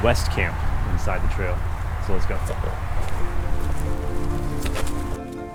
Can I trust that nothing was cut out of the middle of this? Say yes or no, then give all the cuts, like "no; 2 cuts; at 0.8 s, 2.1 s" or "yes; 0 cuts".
yes; 0 cuts